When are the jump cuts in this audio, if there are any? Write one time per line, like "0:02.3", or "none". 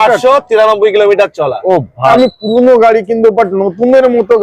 0:02.1